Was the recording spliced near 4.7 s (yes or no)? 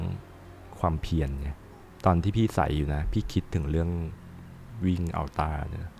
yes